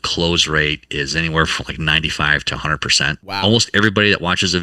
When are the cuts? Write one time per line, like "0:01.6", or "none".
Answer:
0:03.2